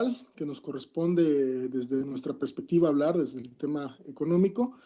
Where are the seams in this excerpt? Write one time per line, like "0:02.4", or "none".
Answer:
0:02.1

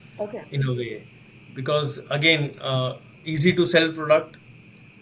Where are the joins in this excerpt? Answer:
none

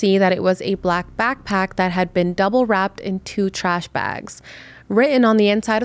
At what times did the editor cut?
none

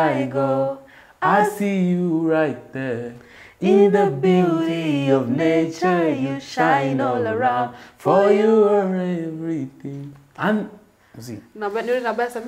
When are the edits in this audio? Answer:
none

